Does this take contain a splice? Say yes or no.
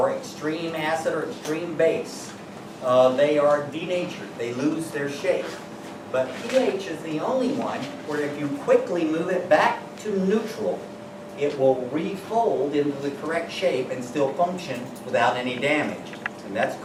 no